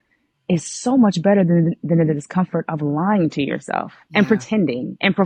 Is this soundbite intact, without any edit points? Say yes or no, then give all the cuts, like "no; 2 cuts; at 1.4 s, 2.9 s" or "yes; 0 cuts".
yes; 0 cuts